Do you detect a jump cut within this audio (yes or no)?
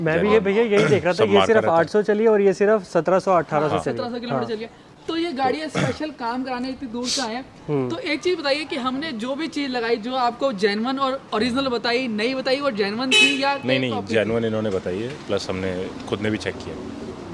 no